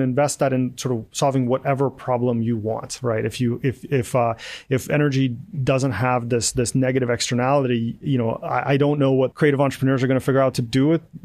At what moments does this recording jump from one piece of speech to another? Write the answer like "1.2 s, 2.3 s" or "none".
9.3 s